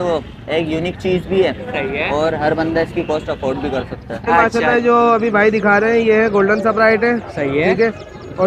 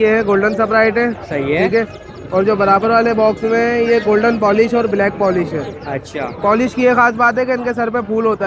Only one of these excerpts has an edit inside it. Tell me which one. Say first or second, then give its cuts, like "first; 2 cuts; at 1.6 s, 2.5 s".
first; 1 cut; at 4.4 s